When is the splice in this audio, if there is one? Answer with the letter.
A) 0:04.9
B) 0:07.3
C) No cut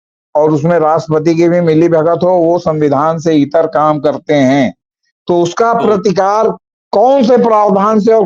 C